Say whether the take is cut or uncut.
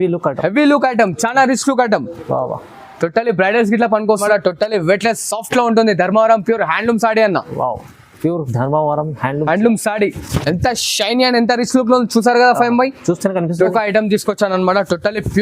cut